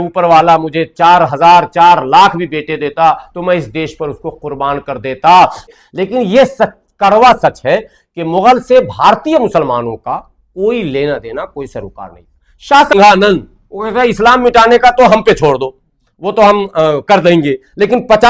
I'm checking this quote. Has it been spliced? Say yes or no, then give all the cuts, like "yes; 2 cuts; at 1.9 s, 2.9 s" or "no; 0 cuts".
yes; 2 cuts; at 5.6 s, 12.9 s